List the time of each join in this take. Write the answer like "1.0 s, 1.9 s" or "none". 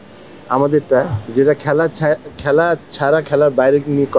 none